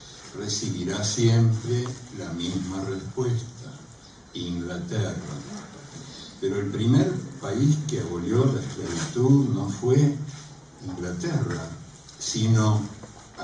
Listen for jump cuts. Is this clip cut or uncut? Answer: uncut